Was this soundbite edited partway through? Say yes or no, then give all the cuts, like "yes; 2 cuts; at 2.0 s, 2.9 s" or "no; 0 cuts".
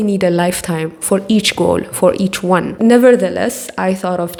no; 0 cuts